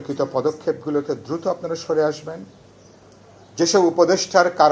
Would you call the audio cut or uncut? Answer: uncut